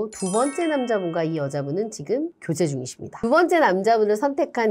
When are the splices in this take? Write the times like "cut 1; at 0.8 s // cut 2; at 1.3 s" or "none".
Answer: cut 1; at 3.2 s